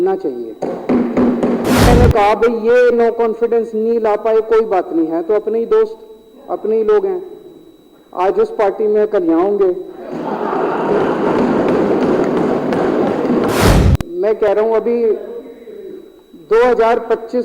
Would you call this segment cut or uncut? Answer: cut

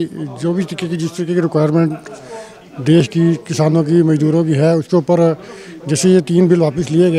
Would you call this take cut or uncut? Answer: uncut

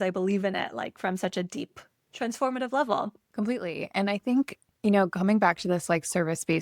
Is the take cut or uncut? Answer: cut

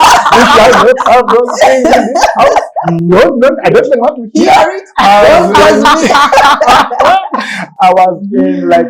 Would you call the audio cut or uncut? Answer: uncut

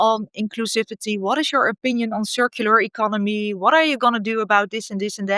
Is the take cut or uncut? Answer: uncut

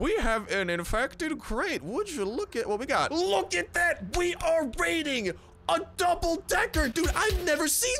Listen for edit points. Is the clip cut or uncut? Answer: cut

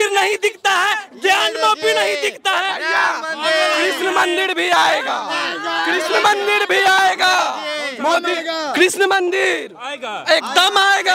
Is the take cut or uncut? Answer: uncut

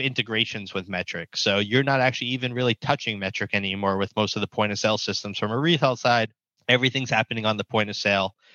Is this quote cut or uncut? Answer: cut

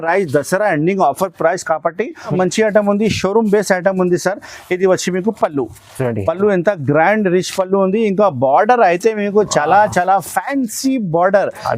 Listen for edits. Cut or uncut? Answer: cut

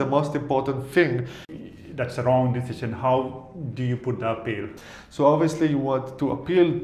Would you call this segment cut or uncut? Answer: cut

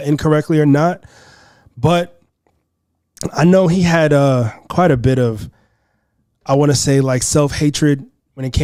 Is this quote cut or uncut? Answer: uncut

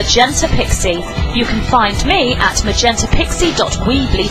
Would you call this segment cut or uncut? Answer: uncut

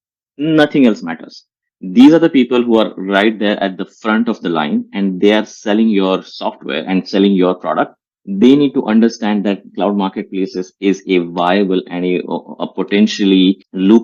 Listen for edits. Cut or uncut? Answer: uncut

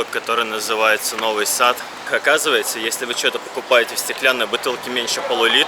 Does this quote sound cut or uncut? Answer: cut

